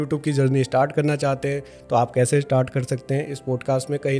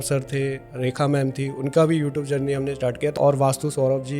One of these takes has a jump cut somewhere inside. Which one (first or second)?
second